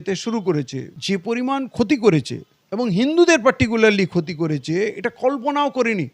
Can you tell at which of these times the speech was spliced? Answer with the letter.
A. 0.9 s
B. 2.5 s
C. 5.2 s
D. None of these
A